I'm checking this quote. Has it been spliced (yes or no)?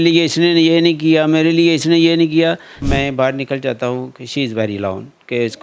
yes